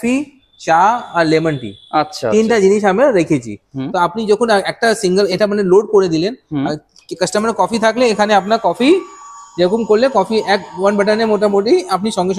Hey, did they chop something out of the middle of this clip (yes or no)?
no